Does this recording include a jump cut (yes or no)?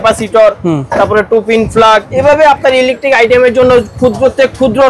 yes